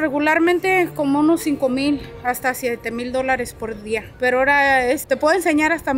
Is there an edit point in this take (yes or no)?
yes